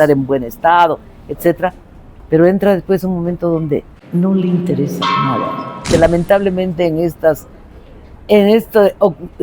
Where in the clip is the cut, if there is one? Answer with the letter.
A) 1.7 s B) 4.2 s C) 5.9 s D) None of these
C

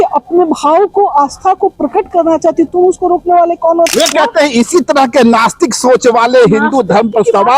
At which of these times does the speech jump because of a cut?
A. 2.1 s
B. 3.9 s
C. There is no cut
B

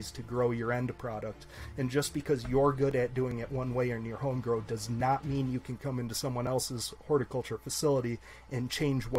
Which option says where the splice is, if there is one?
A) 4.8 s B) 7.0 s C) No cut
C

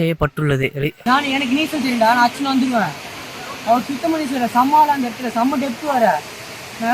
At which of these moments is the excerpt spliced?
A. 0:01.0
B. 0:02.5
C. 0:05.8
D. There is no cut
A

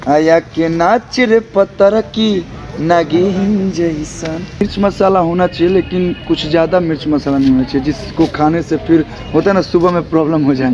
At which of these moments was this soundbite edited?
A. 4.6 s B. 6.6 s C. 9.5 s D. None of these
A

